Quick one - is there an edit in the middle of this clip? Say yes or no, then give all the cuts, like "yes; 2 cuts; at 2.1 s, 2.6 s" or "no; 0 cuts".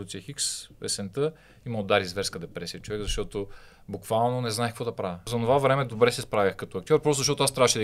yes; 1 cut; at 5.2 s